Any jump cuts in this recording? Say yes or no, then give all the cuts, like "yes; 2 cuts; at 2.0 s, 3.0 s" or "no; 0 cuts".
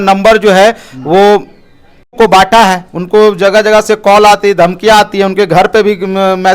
yes; 1 cut; at 2.2 s